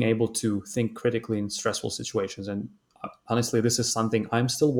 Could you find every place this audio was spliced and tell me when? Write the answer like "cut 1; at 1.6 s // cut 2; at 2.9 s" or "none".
none